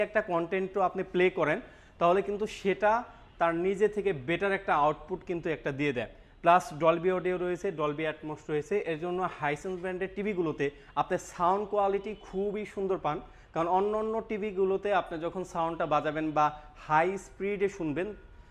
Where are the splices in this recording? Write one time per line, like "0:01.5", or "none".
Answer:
none